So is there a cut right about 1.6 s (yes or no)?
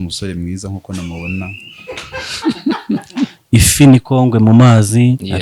no